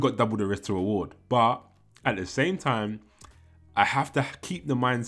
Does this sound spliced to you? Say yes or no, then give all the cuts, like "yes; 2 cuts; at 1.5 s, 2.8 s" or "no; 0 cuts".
no; 0 cuts